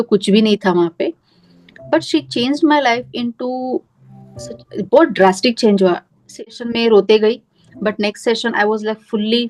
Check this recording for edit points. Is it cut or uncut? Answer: cut